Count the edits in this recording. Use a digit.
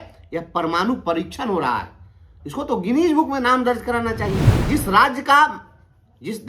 1